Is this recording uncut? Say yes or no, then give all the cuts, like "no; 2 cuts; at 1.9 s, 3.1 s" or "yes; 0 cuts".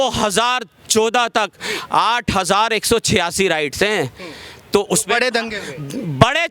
yes; 0 cuts